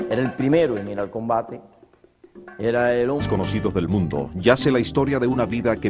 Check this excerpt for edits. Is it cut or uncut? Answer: uncut